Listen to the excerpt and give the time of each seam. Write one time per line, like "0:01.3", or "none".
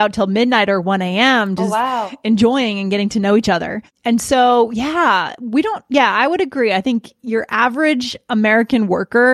0:03.9